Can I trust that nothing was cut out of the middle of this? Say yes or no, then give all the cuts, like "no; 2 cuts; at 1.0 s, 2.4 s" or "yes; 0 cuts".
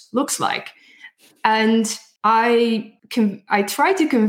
no; 2 cuts; at 2.0 s, 3.0 s